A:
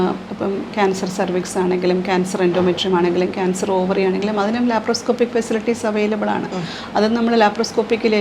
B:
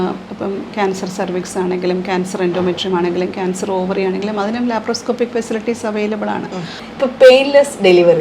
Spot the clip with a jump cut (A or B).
B